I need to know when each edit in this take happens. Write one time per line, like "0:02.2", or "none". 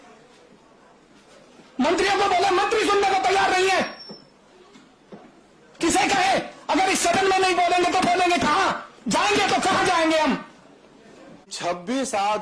0:11.5